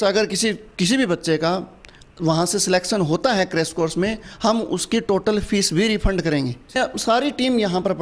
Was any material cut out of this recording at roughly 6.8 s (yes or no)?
yes